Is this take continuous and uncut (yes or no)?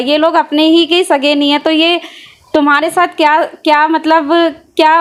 yes